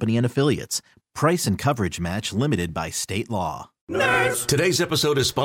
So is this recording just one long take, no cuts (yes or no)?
no